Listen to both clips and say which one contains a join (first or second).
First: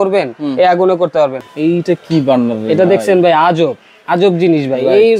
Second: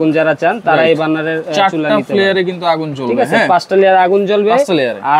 first